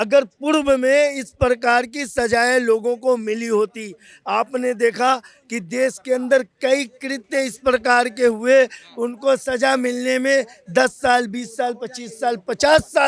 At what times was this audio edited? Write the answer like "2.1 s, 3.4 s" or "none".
none